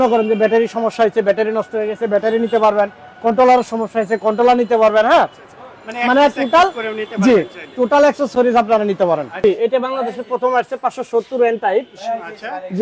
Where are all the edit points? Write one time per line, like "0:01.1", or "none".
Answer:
0:09.4

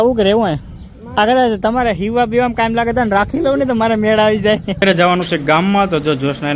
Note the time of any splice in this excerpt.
0:04.8

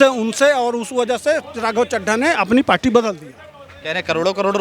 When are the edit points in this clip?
none

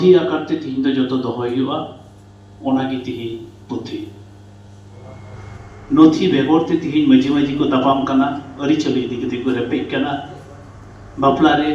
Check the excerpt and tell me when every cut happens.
0:05.4

